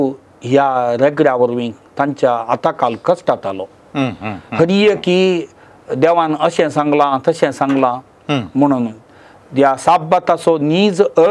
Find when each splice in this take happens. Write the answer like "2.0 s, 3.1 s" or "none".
none